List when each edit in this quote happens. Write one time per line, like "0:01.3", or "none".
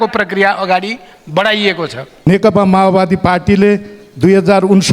0:02.1